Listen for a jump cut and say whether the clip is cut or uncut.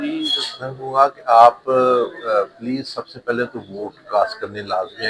uncut